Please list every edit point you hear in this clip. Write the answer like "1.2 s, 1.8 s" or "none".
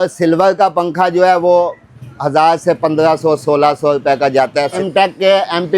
4.8 s

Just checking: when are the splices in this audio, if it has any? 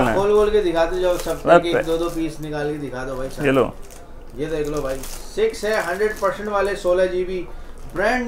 none

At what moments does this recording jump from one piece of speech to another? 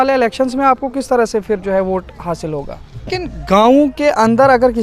3.1 s

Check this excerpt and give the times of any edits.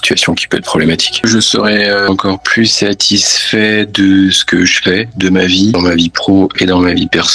1.2 s, 2.1 s, 5.7 s

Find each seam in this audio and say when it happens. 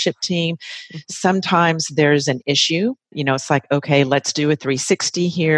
3.1 s

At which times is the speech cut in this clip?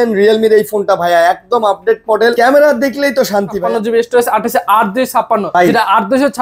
2.3 s, 3.6 s, 5.5 s

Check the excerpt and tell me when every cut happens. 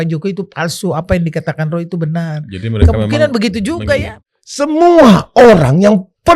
4.1 s

